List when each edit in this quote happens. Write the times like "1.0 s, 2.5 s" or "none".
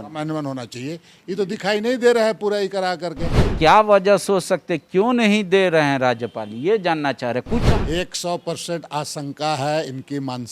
3.4 s, 7.6 s